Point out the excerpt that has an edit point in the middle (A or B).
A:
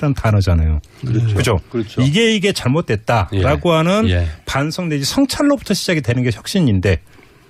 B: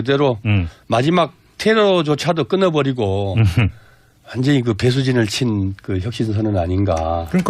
B